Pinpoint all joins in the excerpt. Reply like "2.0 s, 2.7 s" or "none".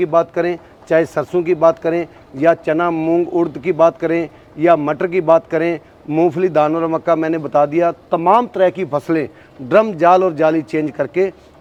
none